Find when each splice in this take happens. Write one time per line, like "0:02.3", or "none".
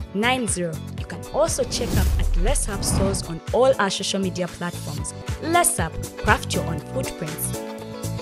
none